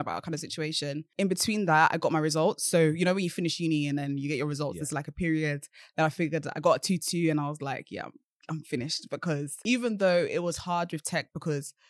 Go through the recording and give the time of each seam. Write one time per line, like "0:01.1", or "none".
0:01.1
0:09.5